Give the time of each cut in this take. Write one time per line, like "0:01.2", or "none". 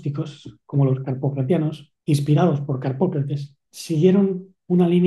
0:01.9